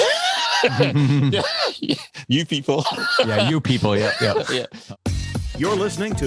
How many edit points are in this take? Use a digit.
1